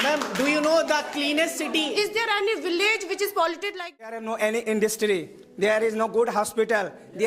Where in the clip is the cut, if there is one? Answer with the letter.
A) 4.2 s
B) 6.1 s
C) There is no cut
A